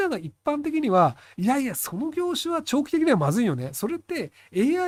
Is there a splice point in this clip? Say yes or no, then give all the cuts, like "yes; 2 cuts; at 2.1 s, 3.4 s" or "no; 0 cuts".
no; 0 cuts